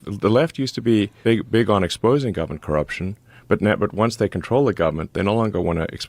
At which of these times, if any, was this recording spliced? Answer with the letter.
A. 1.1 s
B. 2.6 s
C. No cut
A